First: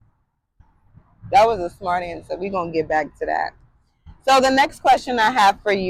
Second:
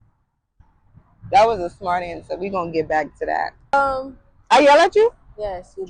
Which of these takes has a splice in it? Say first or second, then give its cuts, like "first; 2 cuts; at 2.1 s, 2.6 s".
second; 1 cut; at 3.7 s